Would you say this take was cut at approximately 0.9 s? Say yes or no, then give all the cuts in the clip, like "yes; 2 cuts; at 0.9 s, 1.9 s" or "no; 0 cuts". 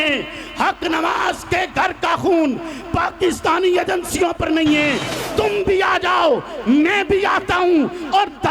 no; 1 cut; at 5.1 s